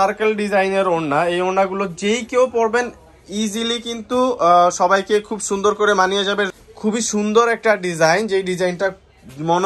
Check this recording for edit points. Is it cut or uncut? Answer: cut